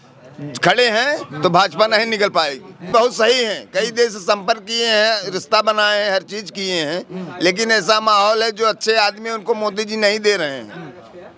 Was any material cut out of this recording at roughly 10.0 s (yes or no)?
no